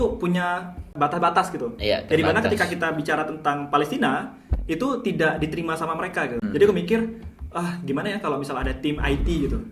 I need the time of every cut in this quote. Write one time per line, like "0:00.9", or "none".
0:00.8
0:06.4